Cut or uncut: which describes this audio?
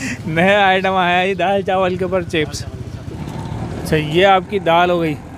cut